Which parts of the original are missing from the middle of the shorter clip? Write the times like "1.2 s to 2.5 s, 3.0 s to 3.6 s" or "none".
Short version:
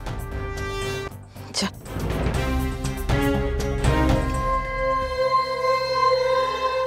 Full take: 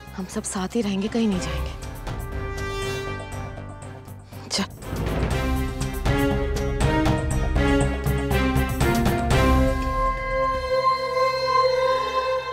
3.1 s to 4.0 s, 7.2 s to 9.8 s